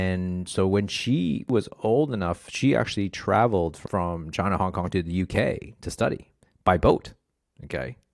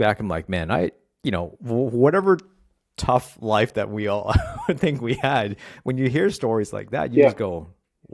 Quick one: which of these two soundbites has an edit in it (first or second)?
first